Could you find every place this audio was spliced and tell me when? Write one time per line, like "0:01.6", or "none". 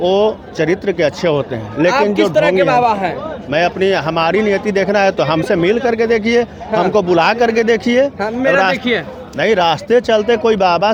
none